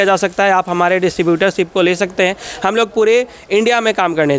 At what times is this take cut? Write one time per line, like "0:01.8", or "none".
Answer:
none